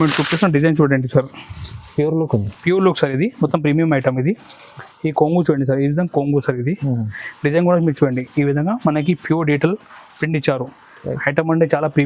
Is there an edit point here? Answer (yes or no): no